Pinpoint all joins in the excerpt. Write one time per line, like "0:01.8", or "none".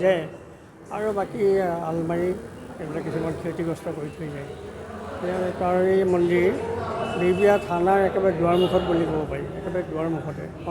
none